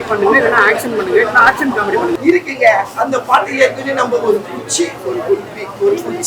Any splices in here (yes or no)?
yes